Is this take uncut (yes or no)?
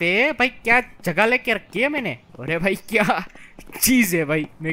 no